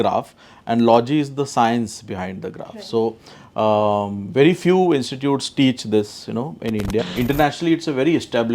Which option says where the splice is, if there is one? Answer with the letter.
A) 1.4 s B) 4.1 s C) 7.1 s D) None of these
C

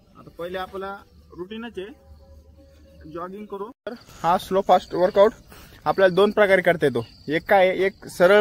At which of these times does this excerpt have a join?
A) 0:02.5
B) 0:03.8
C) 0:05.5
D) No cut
B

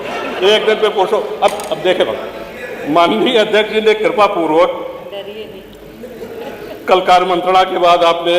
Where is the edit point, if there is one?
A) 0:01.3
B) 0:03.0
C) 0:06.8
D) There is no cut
D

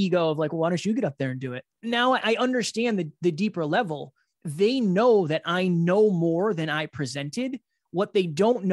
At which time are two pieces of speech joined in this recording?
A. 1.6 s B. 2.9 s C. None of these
A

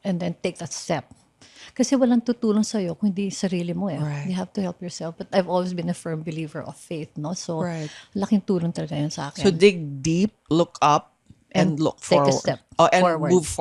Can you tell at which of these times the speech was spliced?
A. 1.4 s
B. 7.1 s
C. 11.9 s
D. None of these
D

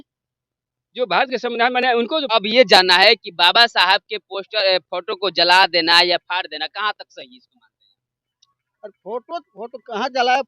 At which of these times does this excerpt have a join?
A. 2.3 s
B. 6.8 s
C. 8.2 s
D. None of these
A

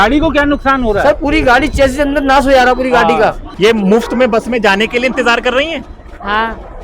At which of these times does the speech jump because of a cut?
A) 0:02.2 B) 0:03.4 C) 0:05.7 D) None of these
B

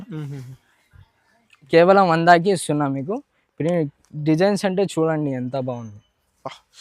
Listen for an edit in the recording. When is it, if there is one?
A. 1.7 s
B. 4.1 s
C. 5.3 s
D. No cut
A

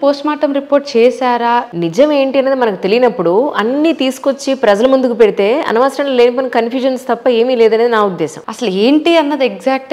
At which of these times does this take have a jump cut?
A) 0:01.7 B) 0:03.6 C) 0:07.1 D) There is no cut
A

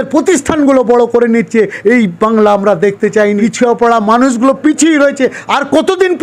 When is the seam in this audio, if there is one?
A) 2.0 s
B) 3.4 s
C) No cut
B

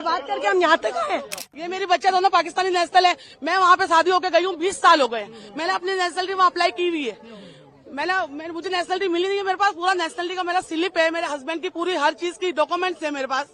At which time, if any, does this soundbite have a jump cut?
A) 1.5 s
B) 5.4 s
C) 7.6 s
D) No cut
A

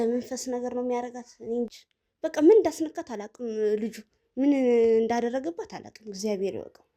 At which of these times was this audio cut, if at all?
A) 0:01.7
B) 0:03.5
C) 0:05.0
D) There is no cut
A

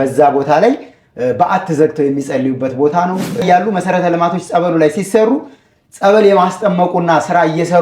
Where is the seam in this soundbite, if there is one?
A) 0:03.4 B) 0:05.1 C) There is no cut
A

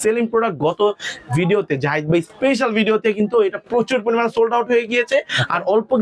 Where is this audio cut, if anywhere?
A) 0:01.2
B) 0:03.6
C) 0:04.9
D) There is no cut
D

